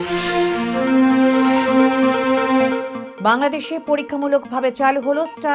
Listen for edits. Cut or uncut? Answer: cut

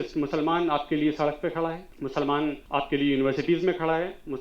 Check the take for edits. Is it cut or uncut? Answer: cut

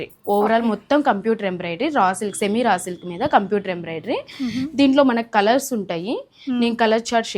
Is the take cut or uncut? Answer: uncut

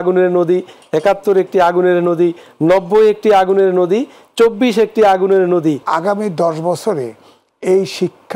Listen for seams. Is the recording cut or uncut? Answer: cut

